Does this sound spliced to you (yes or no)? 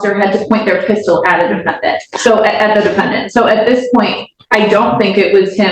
no